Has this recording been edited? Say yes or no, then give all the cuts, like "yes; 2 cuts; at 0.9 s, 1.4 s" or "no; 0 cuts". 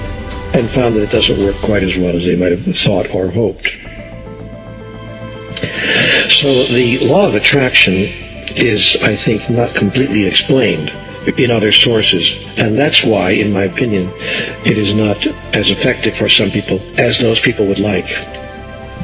no; 0 cuts